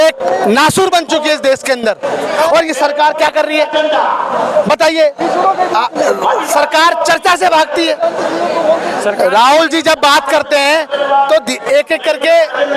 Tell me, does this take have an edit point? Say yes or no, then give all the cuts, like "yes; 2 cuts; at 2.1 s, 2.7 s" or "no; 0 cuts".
no; 0 cuts